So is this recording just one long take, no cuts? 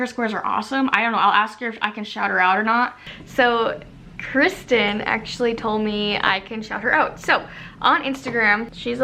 yes; 0 cuts

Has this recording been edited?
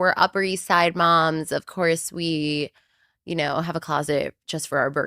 no; 0 cuts

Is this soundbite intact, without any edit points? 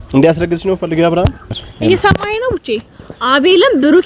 no; 1 cut; at 1.6 s

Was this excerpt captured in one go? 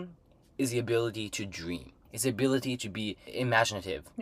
no; 2 cuts; at 2.1 s, 3.2 s

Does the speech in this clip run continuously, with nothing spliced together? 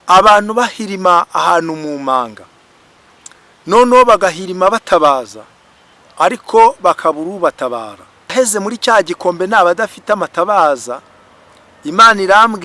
no; 1 cut; at 8.3 s

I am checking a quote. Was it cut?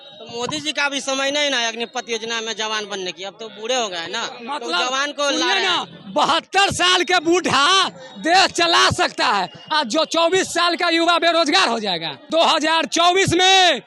yes; 1 cut; at 12.1 s

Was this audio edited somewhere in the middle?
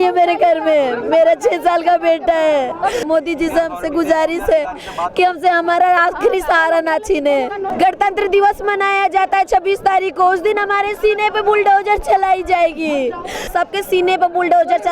yes; 3 cuts; at 3.0 s, 7.6 s, 13.5 s

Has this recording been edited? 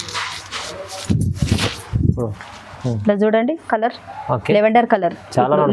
no; 0 cuts

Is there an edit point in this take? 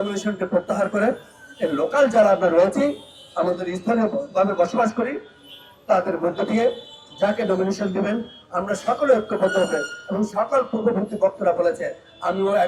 no; 0 cuts

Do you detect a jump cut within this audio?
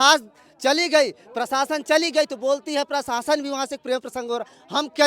no; 0 cuts

